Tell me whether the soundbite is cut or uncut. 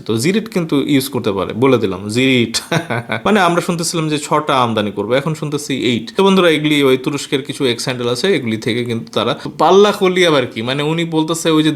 cut